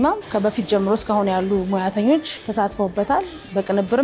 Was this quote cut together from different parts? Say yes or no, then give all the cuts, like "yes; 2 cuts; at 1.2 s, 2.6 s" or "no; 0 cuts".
yes; 1 cut; at 2.4 s